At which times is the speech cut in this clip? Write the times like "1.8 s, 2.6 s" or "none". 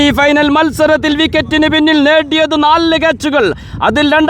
none